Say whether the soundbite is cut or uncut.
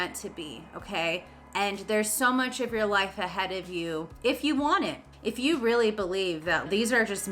cut